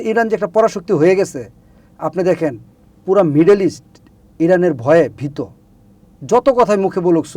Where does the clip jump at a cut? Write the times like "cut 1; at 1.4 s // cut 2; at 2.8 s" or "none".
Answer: none